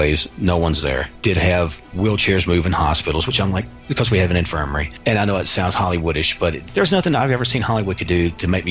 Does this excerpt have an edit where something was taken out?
yes; 4 cuts; at 1.1 s, 1.9 s, 4.8 s, 6.6 s

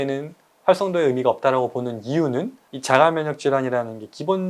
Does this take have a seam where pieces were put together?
yes; 1 cut; at 2.7 s

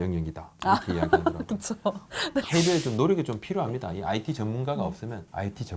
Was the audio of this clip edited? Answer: yes; 1 cut; at 2.5 s

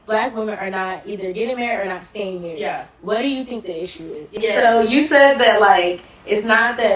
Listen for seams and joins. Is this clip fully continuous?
no; 1 cut; at 4.3 s

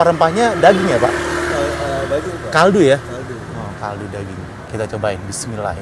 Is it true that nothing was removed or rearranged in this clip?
no; 1 cut; at 4.6 s

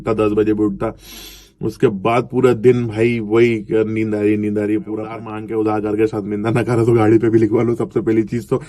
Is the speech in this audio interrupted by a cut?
yes; 1 cut; at 5.3 s

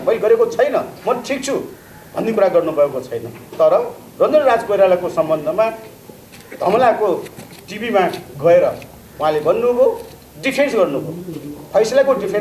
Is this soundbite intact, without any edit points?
yes; 0 cuts

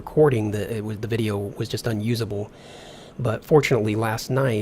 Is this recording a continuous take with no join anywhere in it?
no; 1 cut; at 3.5 s

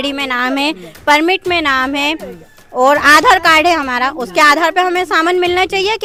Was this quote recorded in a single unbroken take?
yes; 0 cuts

